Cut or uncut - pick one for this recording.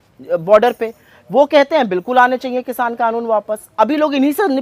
uncut